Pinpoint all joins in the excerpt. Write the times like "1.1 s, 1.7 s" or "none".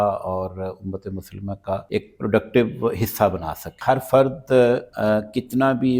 1.8 s, 3.7 s, 4.9 s